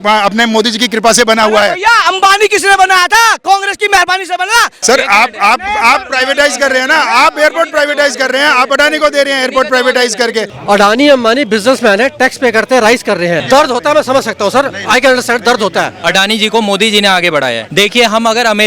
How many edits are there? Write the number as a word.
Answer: five